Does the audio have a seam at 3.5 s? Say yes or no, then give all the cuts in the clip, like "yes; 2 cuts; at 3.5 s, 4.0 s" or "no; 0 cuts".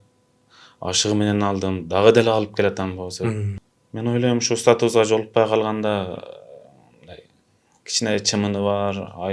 yes; 1 cut; at 3.5 s